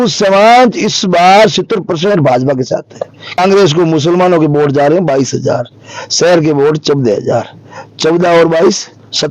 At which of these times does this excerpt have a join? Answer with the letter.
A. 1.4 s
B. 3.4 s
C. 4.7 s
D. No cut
B